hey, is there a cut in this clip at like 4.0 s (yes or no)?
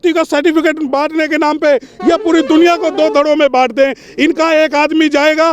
no